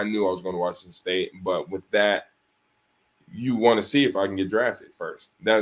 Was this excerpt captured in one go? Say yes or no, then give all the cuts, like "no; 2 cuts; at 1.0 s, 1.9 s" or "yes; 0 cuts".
yes; 0 cuts